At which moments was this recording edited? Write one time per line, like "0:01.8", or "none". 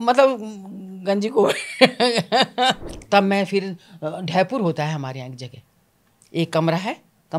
0:02.9